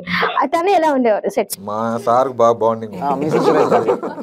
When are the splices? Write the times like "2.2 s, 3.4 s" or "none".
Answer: none